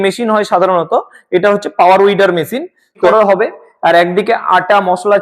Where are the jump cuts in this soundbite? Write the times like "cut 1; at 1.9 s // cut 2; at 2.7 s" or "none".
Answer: cut 1; at 3.1 s